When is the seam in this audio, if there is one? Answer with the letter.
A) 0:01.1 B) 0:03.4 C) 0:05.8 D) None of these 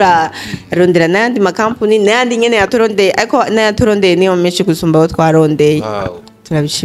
D